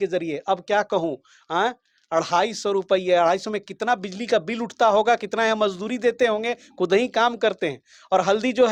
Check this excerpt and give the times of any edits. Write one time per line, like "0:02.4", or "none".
none